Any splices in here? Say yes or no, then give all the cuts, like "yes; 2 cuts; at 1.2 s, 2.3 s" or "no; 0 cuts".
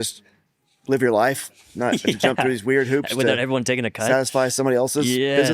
no; 0 cuts